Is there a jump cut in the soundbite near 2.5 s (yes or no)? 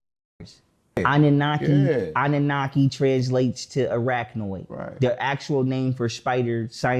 no